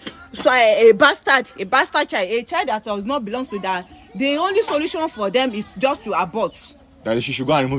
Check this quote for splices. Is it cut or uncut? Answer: uncut